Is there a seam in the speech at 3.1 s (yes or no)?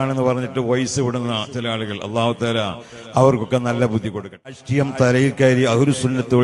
no